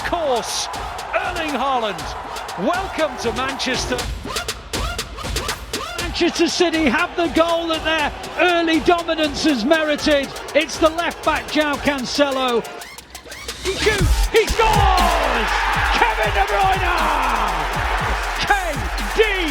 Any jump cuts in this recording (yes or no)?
no